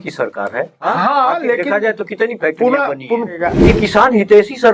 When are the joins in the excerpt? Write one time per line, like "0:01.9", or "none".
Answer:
0:03.4